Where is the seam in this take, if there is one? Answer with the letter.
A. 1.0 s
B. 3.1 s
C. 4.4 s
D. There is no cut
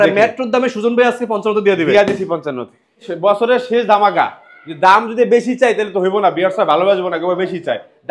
B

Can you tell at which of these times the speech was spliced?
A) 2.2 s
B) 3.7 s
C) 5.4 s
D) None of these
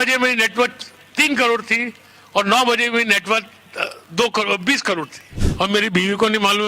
C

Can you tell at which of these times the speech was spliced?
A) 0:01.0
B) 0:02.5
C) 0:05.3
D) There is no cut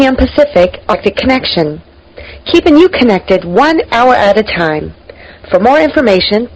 A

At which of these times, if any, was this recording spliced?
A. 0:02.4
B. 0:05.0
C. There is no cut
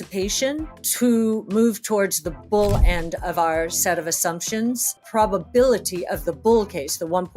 B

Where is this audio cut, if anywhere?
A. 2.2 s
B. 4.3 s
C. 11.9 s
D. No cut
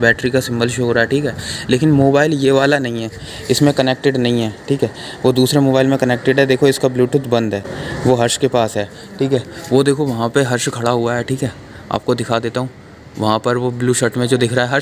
D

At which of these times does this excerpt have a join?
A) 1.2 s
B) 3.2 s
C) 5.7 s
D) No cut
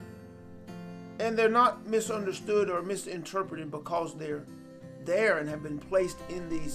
A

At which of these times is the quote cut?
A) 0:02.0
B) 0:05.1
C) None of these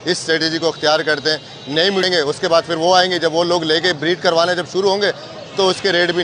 A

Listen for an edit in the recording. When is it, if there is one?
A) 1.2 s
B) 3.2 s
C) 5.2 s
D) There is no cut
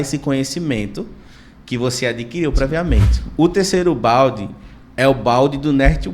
B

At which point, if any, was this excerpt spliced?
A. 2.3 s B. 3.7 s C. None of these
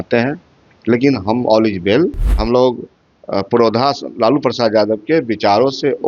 A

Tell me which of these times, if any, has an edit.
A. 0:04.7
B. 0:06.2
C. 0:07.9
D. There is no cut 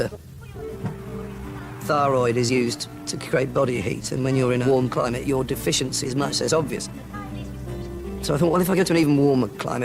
C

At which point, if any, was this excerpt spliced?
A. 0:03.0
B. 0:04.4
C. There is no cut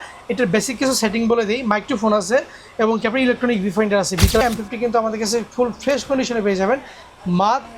B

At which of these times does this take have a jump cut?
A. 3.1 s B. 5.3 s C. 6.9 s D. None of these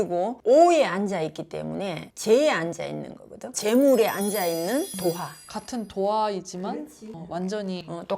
B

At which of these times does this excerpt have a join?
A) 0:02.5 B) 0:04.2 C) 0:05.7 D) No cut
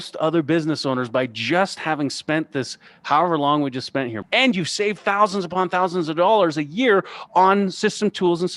B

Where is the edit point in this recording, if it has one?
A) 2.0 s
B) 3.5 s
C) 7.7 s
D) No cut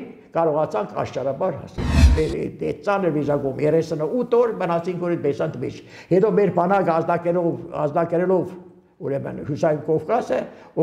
A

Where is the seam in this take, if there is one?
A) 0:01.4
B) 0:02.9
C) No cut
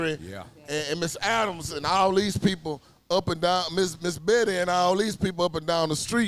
C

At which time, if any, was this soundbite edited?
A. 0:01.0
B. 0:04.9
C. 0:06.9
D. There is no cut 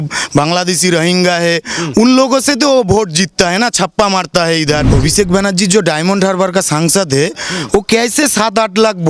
B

